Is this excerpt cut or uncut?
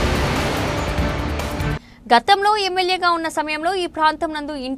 cut